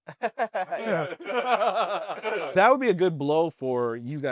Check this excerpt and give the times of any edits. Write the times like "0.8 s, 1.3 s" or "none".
2.5 s

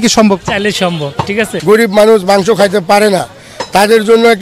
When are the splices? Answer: 1.5 s

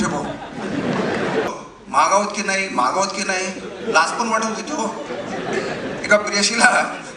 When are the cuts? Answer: 1.5 s

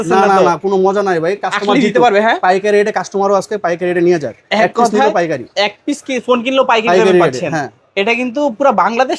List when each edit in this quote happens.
none

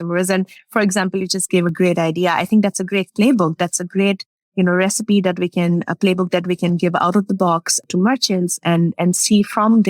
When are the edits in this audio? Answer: none

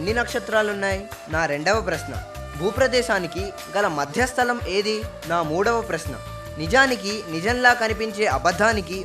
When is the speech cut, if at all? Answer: 1.1 s, 5.1 s

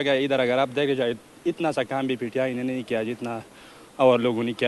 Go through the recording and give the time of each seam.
none

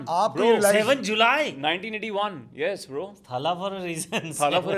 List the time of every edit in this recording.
none

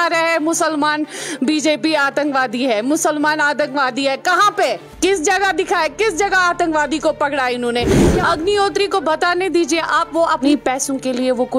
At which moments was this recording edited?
4.9 s, 7.9 s, 10.4 s

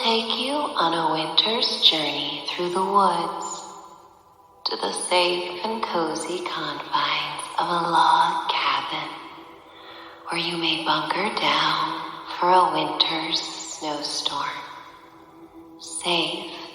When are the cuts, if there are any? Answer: 1.2 s

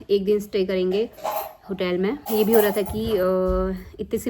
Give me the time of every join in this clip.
2.2 s

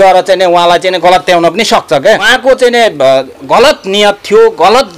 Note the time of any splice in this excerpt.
2.3 s

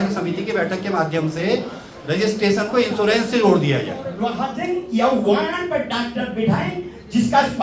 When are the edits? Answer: 4.2 s

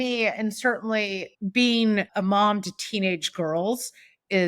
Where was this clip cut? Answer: 1.3 s, 2.1 s

